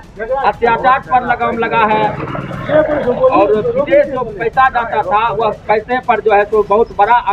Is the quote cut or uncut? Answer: uncut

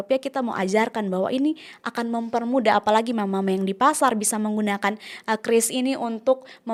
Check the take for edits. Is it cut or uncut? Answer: uncut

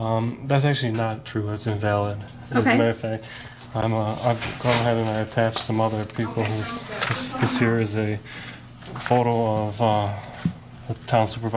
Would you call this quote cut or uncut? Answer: uncut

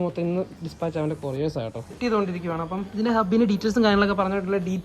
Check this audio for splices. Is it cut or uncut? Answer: cut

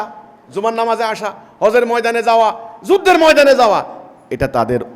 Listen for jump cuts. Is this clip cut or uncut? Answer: uncut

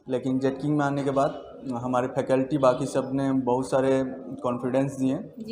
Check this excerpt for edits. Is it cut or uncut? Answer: uncut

